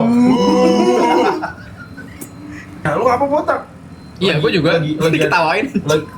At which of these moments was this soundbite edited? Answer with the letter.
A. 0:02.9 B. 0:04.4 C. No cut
A